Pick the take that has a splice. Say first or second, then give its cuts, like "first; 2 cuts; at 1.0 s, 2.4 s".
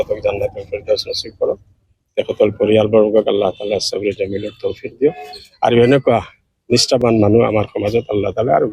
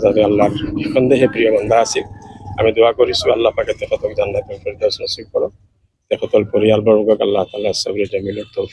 first; 1 cut; at 7.0 s